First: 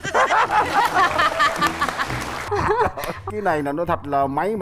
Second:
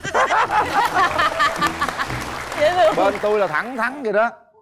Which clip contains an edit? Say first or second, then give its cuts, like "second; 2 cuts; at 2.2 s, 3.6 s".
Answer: first; 1 cut; at 2.4 s